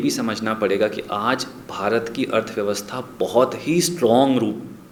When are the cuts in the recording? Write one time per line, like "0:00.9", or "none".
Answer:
none